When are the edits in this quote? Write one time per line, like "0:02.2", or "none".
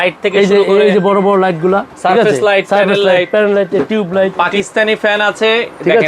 0:04.4